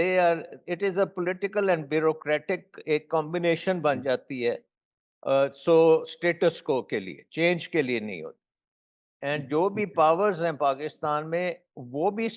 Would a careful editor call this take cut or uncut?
uncut